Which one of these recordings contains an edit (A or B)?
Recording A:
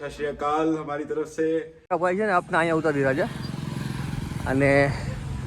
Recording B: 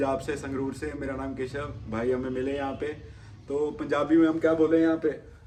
A